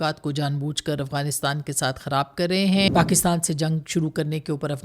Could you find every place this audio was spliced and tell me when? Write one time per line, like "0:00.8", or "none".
0:02.9